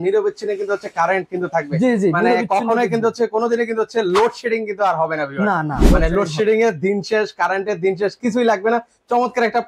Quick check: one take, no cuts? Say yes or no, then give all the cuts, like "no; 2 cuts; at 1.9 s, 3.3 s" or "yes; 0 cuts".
yes; 0 cuts